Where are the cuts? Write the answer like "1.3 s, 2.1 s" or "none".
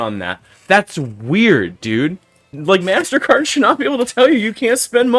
2.5 s